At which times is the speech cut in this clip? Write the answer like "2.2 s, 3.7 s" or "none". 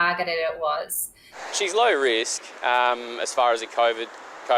1.3 s